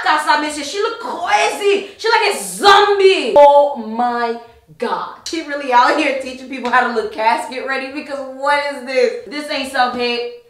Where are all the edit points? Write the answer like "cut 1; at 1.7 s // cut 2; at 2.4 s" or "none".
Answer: cut 1; at 3.4 s // cut 2; at 5.3 s // cut 3; at 9.2 s